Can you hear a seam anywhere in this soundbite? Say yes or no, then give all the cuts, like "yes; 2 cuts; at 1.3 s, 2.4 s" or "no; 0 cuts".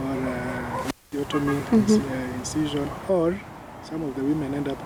no; 0 cuts